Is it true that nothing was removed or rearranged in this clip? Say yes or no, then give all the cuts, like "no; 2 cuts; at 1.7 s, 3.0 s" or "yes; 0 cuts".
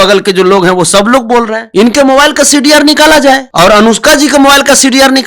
no; 2 cuts; at 1.6 s, 3.5 s